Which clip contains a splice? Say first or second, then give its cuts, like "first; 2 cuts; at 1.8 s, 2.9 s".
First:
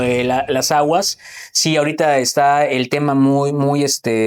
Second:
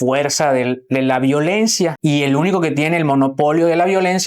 second; 1 cut; at 2.0 s